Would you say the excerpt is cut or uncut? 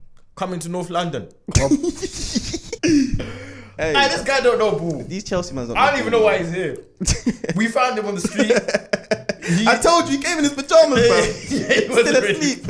cut